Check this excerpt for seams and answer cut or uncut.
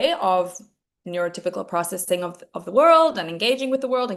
uncut